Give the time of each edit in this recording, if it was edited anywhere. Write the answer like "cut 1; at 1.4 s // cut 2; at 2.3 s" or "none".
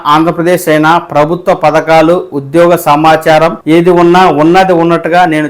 cut 1; at 3.6 s